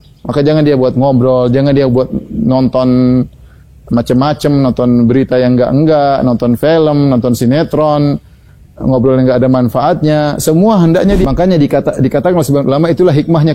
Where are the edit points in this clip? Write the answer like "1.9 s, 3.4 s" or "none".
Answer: 11.2 s